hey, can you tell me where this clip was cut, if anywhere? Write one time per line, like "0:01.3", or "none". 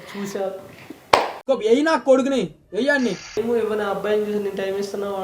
0:03.3